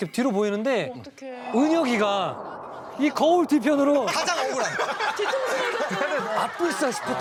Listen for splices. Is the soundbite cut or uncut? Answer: uncut